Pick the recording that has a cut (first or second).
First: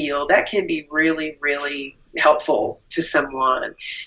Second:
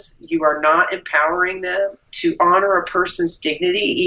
second